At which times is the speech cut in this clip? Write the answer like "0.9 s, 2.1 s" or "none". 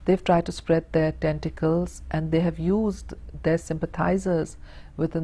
2.3 s